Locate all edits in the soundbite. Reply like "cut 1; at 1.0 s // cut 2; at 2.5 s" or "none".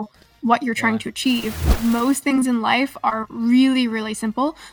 cut 1; at 1.7 s

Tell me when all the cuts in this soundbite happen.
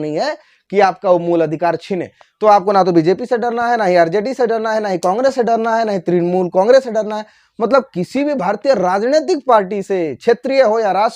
none

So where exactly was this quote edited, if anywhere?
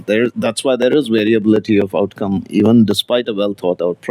none

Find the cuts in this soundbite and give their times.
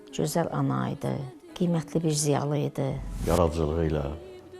cut 1; at 1.4 s // cut 2; at 3.1 s

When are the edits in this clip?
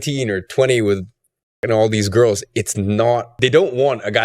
cut 1; at 3.3 s

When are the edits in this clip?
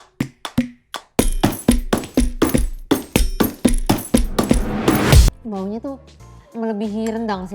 cut 1; at 5.3 s

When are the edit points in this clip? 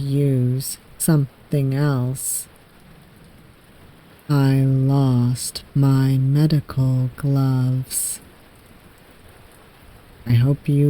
cut 1; at 4.0 s

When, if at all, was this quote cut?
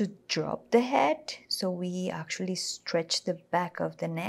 none

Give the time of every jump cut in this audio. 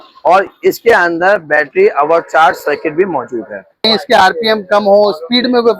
cut 1; at 3.9 s

